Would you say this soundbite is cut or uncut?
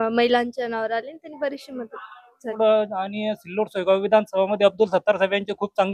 cut